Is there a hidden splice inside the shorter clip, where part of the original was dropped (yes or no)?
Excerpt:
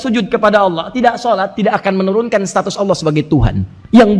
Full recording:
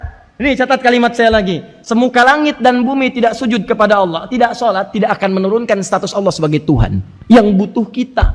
no